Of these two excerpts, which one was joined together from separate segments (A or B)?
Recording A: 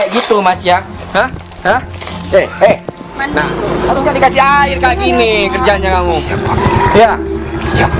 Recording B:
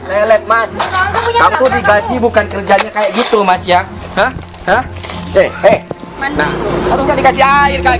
B